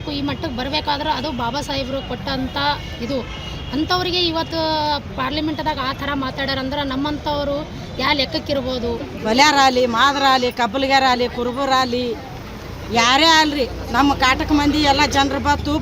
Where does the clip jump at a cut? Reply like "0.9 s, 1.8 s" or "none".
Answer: 9.1 s

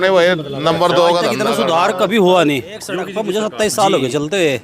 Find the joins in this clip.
1.4 s, 3.1 s

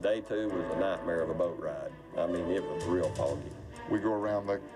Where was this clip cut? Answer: none

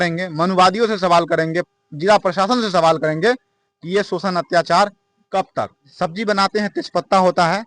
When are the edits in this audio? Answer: 5.8 s

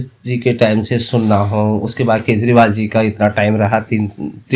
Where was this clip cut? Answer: none

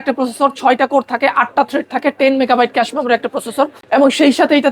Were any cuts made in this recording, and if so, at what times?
3.8 s

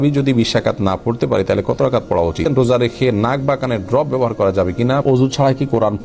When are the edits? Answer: 2.5 s, 5.0 s

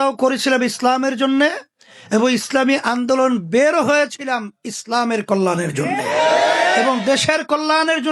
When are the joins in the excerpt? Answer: none

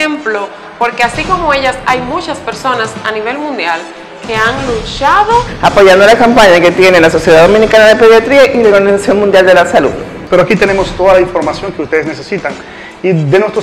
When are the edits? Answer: 5.5 s, 10.2 s

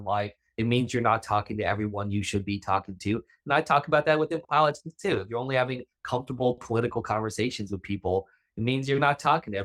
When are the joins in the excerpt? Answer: none

